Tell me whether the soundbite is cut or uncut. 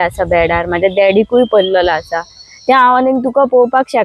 uncut